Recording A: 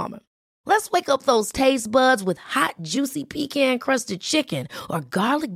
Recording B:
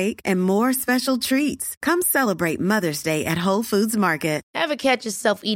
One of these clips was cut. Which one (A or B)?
B